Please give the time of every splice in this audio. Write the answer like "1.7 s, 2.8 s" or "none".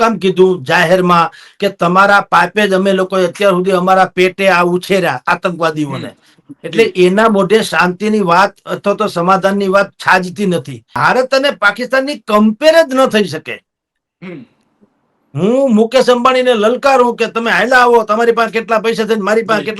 10.9 s

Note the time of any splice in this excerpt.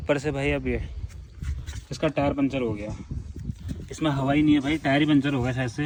none

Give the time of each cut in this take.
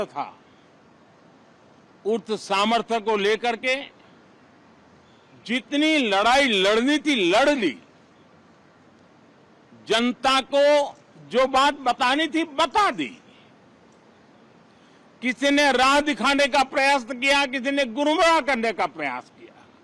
none

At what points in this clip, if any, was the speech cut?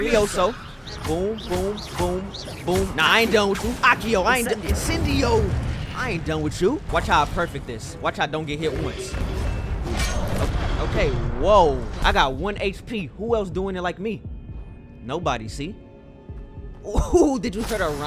6.9 s, 9.2 s, 11.9 s

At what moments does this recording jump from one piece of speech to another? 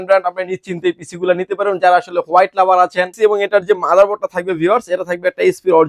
3.1 s

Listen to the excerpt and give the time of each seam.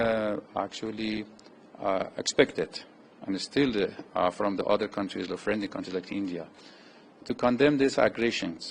none

